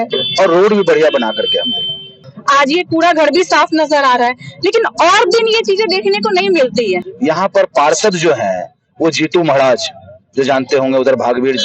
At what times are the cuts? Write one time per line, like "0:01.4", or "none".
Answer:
0:02.2
0:07.1